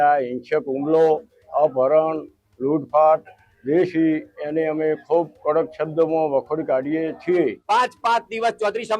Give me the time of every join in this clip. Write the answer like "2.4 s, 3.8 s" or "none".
7.6 s